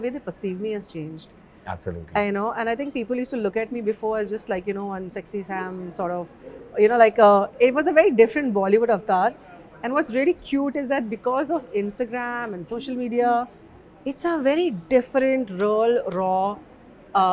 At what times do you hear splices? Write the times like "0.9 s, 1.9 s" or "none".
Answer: none